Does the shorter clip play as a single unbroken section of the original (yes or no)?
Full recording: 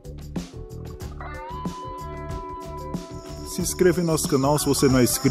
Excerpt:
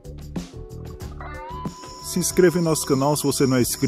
no